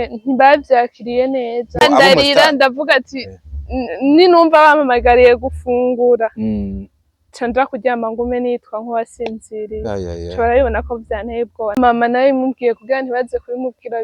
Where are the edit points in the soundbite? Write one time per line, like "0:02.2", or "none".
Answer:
0:01.8
0:11.8